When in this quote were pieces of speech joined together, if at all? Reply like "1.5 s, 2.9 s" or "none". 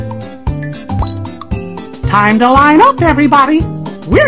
1.0 s